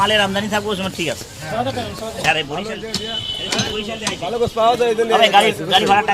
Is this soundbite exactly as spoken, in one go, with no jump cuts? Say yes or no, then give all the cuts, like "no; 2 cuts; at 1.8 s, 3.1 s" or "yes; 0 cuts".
no; 1 cut; at 2.3 s